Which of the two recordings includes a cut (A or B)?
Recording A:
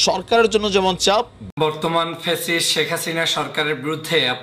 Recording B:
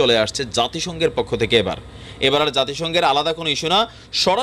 A